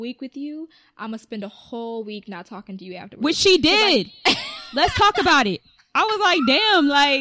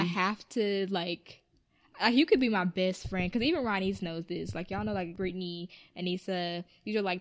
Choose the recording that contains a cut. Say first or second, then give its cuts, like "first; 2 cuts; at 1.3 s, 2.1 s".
second; 1 cut; at 5.1 s